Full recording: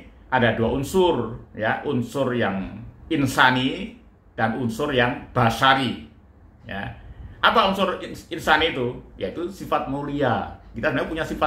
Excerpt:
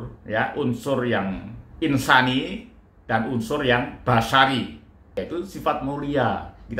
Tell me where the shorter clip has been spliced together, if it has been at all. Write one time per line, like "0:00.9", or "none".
0:05.0

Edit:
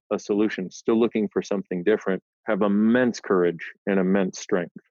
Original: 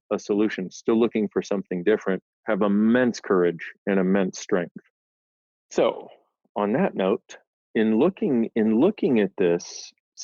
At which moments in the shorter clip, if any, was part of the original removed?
none

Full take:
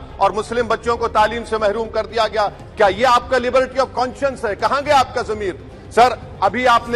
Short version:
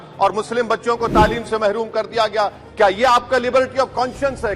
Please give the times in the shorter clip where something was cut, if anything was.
none

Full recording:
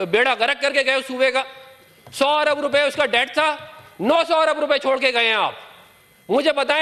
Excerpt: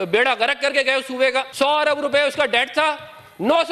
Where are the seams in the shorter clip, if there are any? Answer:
0:01.5

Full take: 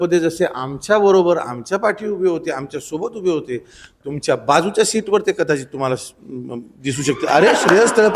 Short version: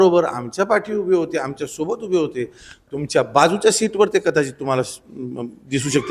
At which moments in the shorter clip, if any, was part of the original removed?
none

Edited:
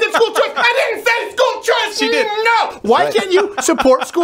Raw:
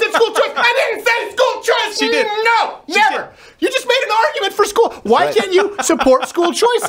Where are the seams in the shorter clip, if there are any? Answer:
0:02.8

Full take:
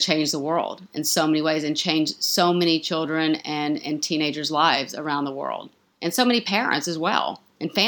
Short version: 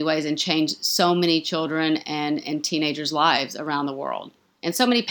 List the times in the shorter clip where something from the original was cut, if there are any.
none

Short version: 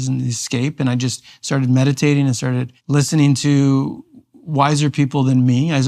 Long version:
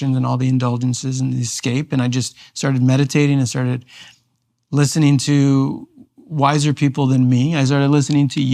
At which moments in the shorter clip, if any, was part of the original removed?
0:02.7

